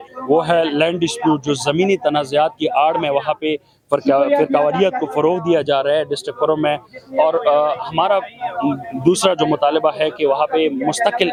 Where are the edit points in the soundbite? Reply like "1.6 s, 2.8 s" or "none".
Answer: none

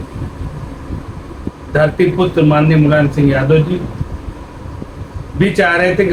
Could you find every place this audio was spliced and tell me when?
none

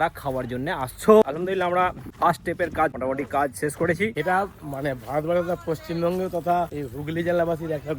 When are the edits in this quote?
1.2 s, 4.2 s

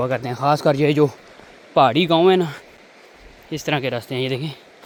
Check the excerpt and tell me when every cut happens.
none

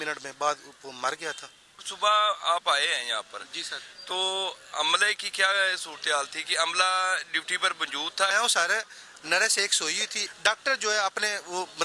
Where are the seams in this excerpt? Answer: 1.9 s, 8.3 s, 10.1 s

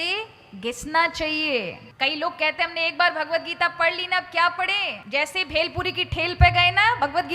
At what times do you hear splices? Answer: 1.8 s, 4.9 s

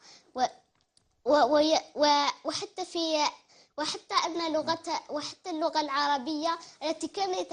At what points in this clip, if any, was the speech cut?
5.5 s

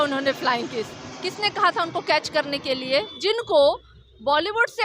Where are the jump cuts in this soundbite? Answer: 3.2 s

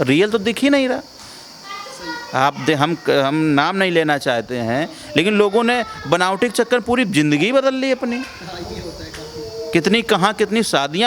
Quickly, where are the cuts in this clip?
none

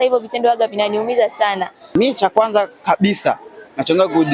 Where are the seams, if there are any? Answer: 1.8 s

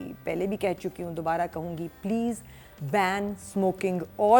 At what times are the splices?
none

